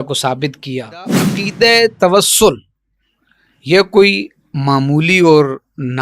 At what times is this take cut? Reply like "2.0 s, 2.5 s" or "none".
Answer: 1.3 s